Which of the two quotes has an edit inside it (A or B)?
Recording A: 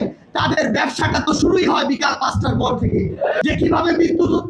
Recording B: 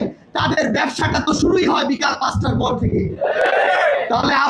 A